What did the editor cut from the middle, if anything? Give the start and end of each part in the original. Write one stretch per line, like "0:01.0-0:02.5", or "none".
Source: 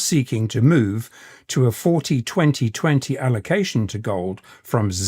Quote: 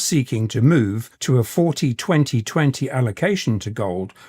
0:01.1-0:01.4